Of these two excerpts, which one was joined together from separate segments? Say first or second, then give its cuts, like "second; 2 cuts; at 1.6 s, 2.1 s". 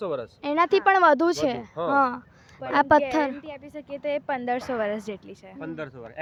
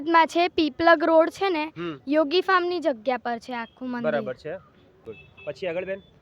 second; 1 cut; at 5.0 s